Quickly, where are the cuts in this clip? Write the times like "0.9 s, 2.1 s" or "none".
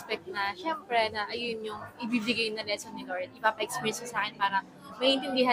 none